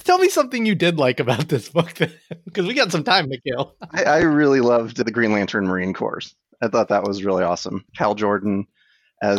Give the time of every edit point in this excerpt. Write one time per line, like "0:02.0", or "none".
none